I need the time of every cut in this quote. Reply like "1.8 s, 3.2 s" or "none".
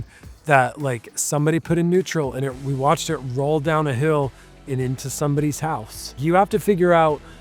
6.2 s